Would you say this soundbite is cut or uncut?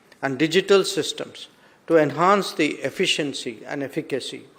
uncut